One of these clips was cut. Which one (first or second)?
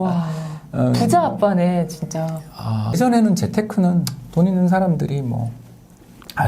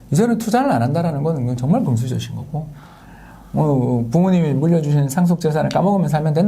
first